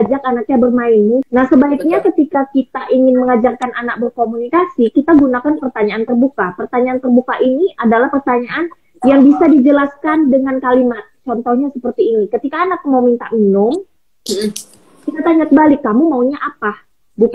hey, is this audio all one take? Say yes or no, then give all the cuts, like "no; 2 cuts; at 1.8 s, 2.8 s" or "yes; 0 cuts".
no; 1 cut; at 1.2 s